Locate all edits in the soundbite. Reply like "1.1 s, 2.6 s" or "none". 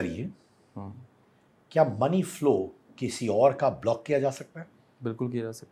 none